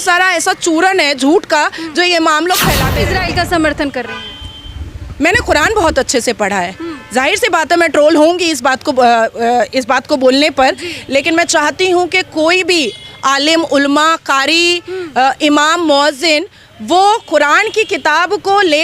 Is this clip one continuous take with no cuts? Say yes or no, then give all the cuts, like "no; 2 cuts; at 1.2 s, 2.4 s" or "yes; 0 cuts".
no; 1 cut; at 2.9 s